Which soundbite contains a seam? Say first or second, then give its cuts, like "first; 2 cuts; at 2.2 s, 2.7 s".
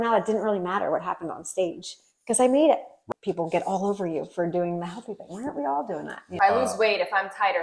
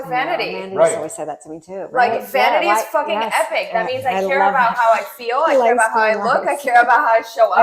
first; 2 cuts; at 2.9 s, 6.3 s